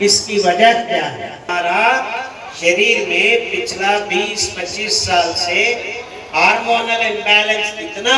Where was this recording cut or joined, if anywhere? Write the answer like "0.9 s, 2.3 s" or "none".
1.5 s